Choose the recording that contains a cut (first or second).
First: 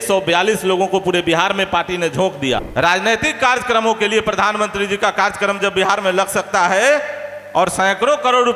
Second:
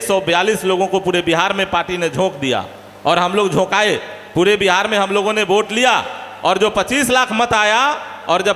first